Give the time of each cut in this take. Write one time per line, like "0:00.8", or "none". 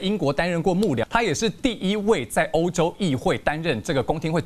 0:01.0